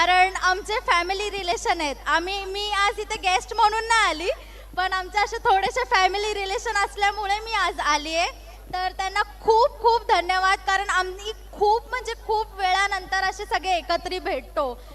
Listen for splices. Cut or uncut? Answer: uncut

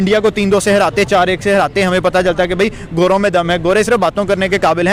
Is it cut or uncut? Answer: uncut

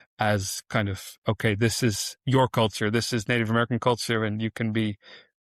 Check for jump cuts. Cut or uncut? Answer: uncut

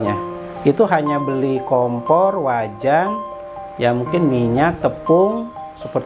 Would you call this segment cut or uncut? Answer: uncut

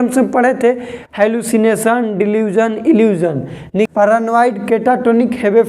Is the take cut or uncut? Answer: cut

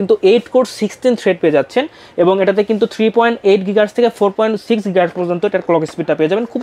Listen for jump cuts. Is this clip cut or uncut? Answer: uncut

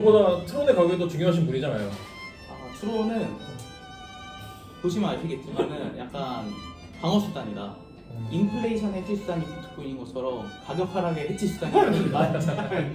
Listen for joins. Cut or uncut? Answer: uncut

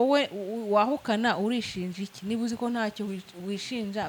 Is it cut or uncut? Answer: uncut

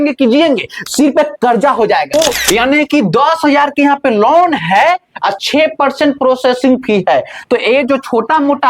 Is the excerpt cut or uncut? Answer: cut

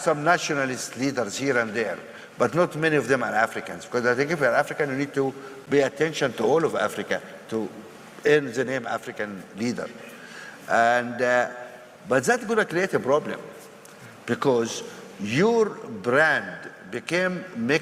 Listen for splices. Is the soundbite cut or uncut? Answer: uncut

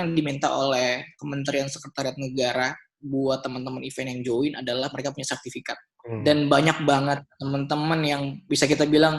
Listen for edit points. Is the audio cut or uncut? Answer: cut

